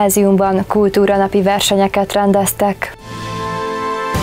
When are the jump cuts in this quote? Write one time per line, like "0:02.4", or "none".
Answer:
0:03.3